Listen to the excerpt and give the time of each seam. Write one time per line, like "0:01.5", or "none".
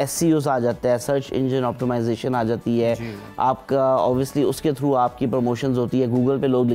none